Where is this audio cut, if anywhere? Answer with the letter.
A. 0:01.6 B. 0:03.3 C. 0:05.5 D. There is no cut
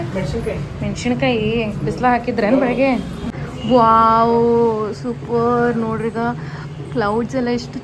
B